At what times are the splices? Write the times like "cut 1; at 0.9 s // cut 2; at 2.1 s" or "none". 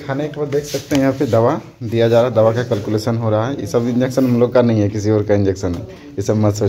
none